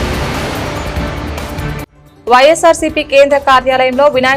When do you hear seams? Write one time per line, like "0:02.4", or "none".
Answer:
none